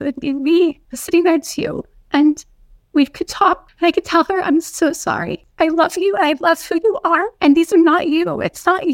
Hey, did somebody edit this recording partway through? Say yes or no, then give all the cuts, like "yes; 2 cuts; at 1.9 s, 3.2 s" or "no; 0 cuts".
yes; 4 cuts; at 0.9 s, 3.7 s, 5.4 s, 7.3 s